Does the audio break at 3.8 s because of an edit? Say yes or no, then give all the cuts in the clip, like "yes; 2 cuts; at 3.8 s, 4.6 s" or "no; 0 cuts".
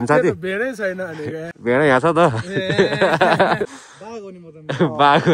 yes; 2 cuts; at 1.5 s, 3.8 s